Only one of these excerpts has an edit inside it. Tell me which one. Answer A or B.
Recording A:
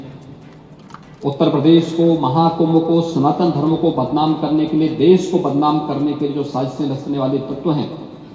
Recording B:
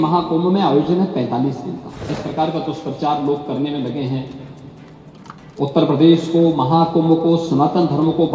B